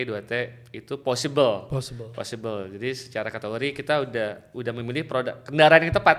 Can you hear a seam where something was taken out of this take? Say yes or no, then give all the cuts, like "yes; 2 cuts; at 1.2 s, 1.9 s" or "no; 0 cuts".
no; 0 cuts